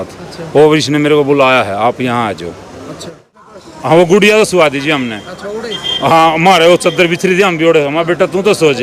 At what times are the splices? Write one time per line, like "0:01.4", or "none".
0:03.3